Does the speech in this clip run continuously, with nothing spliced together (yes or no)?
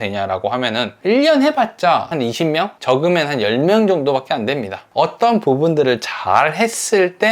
no